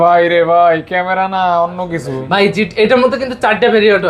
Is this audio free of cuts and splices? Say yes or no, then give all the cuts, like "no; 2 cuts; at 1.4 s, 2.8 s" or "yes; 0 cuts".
yes; 0 cuts